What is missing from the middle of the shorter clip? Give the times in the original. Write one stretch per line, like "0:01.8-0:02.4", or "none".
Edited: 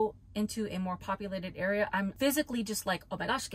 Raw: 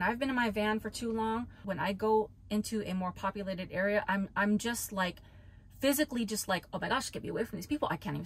0:04.3-0:05.8